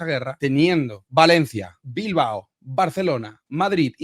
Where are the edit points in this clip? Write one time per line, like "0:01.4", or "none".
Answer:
none